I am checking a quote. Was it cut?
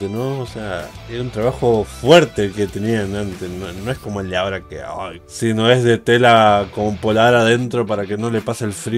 no; 0 cuts

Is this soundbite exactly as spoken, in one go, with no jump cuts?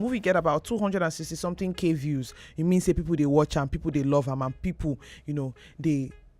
yes; 0 cuts

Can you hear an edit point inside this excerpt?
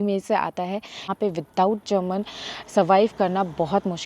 yes; 1 cut; at 1.1 s

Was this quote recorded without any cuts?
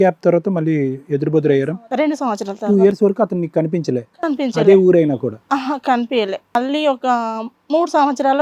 no; 2 cuts; at 1.8 s, 6.5 s

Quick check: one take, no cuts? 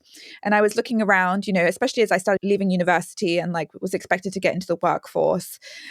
no; 1 cut; at 2.4 s

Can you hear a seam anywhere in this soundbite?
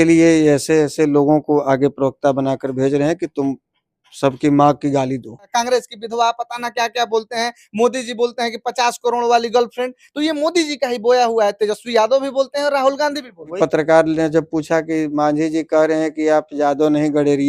yes; 2 cuts; at 5.5 s, 13.6 s

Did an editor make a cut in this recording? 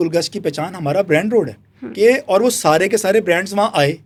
no; 0 cuts

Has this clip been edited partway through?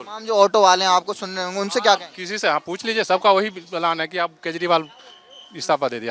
no; 0 cuts

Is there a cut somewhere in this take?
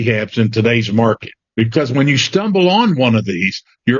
yes; 1 cut; at 1.4 s

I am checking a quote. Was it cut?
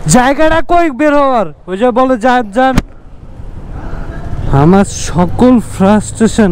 yes; 1 cut; at 4.4 s

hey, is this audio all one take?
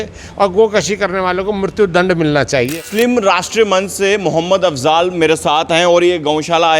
no; 1 cut; at 2.7 s

